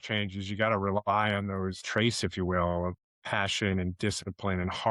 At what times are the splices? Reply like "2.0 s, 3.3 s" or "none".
1.8 s, 3.0 s